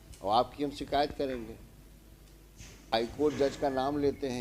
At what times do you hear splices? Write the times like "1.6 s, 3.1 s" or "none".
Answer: 2.9 s